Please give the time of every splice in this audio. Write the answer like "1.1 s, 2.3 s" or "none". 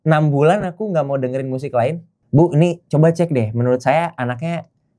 2.1 s